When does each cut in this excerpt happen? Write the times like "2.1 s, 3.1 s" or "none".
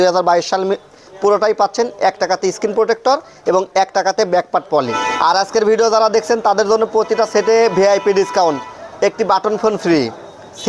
5.0 s